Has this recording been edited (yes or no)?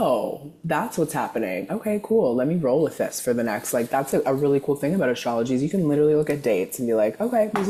no